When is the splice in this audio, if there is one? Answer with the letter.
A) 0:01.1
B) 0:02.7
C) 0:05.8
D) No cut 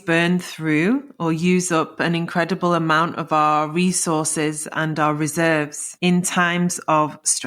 C